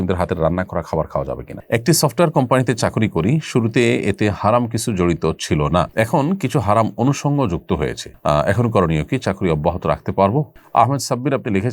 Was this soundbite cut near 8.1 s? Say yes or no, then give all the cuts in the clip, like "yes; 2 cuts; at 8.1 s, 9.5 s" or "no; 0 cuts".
no; 2 cuts; at 1.5 s, 10.6 s